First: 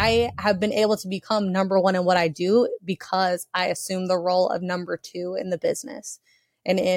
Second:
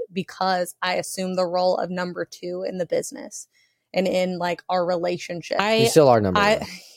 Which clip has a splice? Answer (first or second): second